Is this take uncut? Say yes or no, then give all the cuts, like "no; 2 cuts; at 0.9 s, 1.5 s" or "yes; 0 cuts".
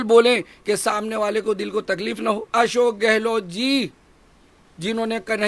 no; 1 cut; at 2.5 s